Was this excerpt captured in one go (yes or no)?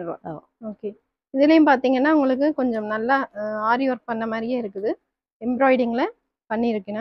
yes